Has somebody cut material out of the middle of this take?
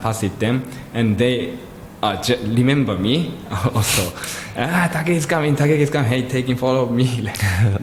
no; 0 cuts

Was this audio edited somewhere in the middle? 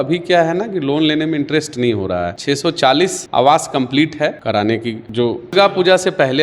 yes; 3 cuts; at 2.4 s, 4.4 s, 5.5 s

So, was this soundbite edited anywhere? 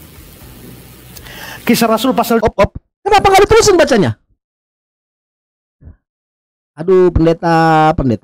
yes; 1 cut; at 2.4 s

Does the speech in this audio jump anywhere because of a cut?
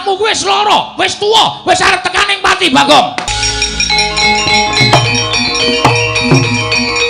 yes; 1 cut; at 3.4 s

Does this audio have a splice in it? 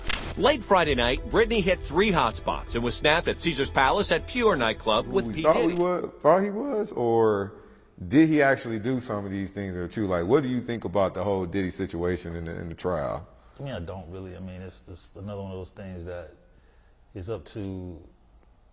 yes; 1 cut; at 5.3 s

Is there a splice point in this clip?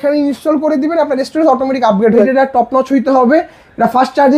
yes; 1 cut; at 2.2 s

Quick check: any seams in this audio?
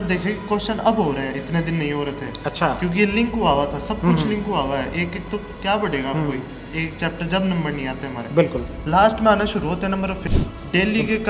yes; 1 cut; at 10.3 s

